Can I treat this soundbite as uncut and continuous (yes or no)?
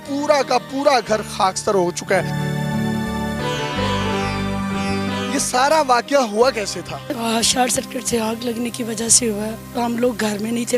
yes